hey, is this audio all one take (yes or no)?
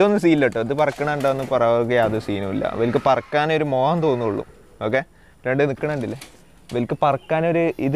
yes